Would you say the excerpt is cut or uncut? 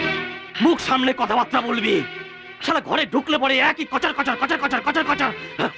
uncut